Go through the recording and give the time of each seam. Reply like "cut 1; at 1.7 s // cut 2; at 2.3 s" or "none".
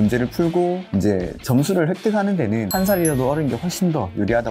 cut 1; at 0.8 s // cut 2; at 2.7 s